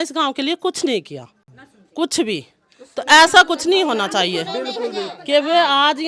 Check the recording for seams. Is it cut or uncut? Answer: uncut